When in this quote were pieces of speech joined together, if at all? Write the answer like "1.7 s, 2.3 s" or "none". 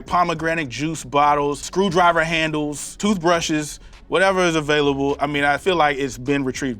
1.6 s, 5.6 s